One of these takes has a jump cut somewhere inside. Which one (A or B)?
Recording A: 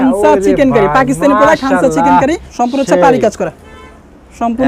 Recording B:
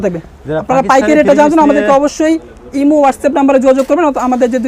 A